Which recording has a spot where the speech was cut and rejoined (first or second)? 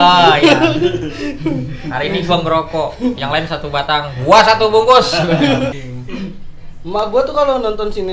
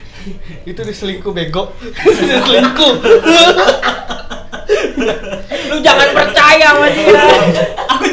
first